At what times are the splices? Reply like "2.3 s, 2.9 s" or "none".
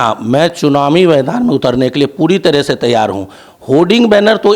none